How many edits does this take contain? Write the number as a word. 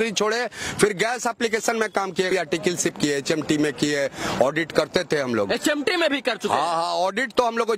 one